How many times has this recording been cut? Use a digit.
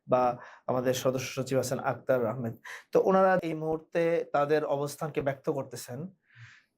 1